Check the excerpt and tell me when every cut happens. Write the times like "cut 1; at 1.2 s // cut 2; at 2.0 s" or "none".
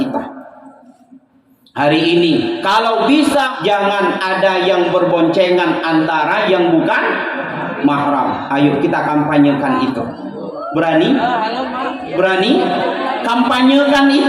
cut 1; at 3.5 s